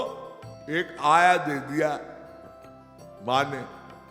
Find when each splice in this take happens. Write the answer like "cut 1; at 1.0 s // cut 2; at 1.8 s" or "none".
none